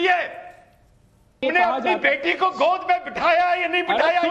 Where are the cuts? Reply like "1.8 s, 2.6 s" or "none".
1.4 s